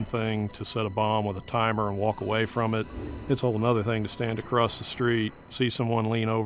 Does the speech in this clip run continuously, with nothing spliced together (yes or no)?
yes